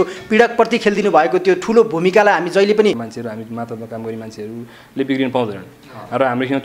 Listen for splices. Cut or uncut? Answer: cut